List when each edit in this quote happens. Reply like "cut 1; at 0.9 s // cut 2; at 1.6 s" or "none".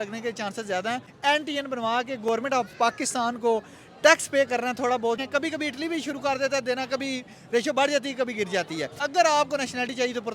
cut 1; at 1.1 s // cut 2; at 5.2 s // cut 3; at 9.0 s